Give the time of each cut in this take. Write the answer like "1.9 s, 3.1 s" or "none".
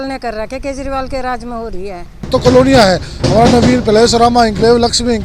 2.3 s